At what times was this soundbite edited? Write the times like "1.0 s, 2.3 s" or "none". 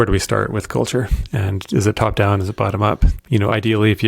3.1 s

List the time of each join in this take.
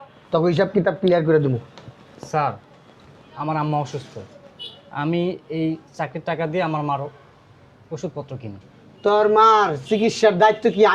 none

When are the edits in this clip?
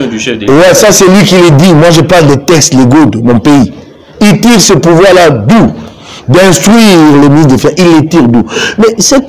none

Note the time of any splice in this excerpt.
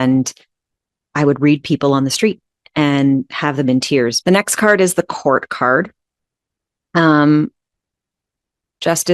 4.2 s

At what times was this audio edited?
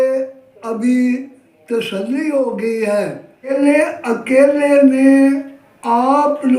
3.5 s

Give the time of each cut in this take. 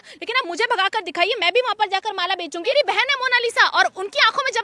2.7 s

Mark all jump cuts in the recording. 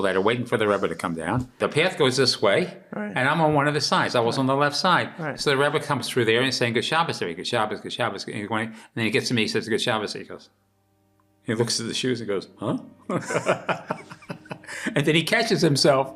1.5 s

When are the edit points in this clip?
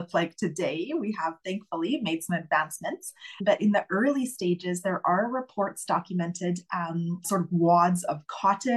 3.4 s, 7.2 s

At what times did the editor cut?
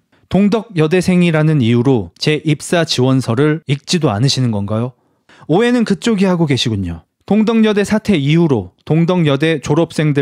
5.2 s

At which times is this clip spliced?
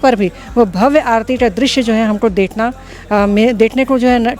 none

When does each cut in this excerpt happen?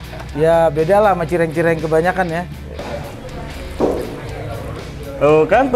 2.8 s

